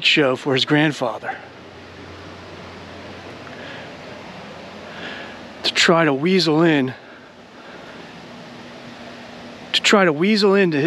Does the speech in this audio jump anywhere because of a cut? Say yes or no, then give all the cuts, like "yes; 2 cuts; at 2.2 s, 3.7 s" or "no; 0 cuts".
no; 0 cuts